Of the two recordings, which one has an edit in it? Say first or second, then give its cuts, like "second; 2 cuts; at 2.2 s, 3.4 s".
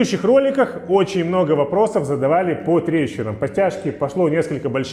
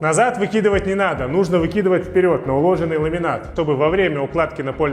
second; 1 cut; at 3.5 s